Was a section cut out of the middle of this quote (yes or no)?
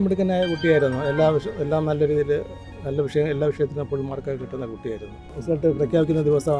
yes